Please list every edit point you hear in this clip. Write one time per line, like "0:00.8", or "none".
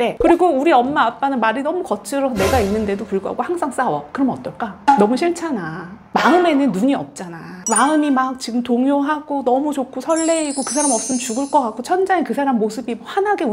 0:06.0